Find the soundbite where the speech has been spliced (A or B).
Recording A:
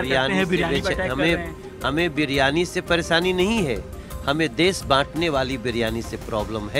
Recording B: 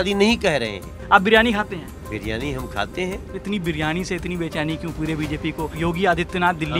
B